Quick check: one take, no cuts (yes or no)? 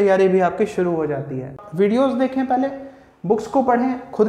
no